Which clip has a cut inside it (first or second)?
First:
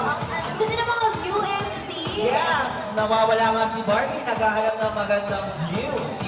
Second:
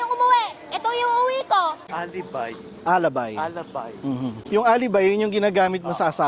second